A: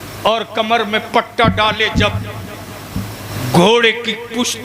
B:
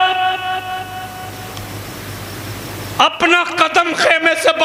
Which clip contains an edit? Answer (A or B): A